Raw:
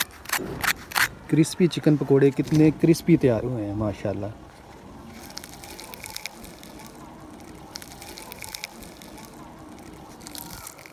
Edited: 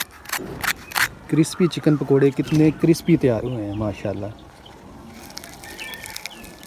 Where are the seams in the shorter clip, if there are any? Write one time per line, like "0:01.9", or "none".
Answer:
none